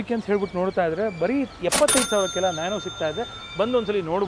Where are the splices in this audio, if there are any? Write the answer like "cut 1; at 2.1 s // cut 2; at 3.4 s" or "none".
none